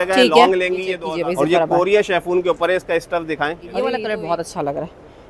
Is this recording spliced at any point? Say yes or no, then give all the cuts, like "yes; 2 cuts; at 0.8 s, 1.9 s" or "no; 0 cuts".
yes; 2 cuts; at 1.0 s, 3.9 s